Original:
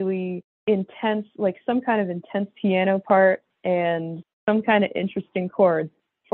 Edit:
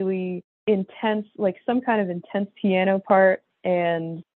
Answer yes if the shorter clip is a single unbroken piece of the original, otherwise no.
yes